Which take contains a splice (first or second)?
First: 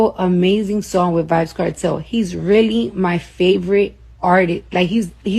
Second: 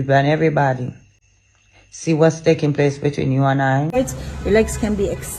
second